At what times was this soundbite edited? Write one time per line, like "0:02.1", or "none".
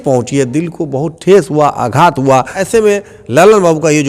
0:02.6